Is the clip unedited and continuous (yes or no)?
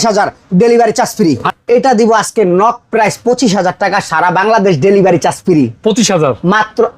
no